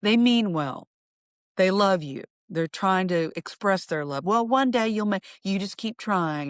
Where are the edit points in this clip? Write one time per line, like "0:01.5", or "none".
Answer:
none